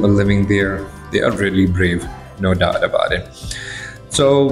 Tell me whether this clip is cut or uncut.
uncut